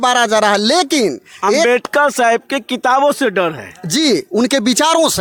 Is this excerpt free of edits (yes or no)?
yes